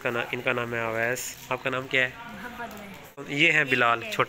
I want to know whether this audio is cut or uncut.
cut